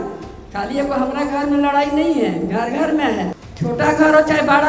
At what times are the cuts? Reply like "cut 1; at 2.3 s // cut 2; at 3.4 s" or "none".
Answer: cut 1; at 3.4 s